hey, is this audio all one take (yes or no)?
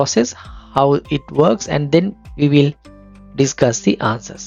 yes